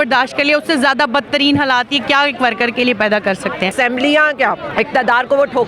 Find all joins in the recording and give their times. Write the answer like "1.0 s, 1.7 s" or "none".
3.7 s, 4.7 s